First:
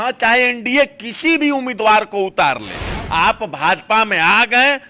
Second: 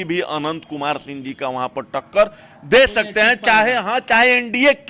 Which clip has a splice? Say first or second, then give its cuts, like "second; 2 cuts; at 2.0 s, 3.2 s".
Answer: first; 1 cut; at 2.9 s